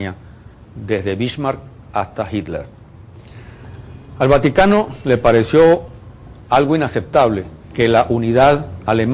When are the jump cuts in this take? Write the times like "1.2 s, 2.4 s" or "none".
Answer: 2.3 s